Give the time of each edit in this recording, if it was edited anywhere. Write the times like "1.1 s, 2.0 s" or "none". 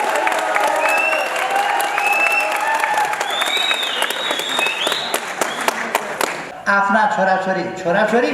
6.5 s